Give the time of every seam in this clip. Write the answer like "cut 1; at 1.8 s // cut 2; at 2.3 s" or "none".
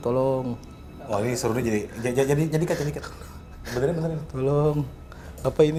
none